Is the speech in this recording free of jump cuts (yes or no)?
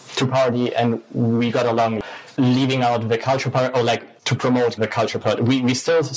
no